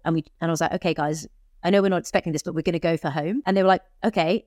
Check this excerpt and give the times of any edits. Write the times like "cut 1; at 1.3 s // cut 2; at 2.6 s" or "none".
cut 1; at 3.4 s